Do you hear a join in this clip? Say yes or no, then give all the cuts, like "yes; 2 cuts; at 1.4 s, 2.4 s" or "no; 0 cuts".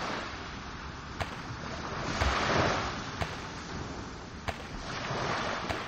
no; 0 cuts